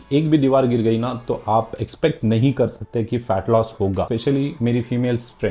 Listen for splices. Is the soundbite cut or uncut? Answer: cut